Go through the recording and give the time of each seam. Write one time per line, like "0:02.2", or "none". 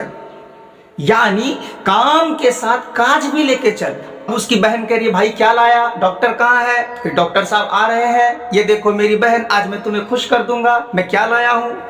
0:04.3